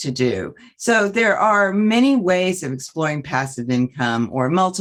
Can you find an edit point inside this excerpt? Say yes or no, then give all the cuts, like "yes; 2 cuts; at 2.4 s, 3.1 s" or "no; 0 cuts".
no; 0 cuts